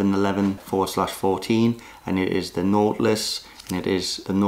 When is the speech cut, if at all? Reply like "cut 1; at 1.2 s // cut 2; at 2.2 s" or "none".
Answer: none